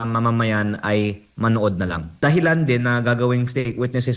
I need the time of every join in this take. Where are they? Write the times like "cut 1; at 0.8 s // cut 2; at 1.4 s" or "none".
cut 1; at 2.1 s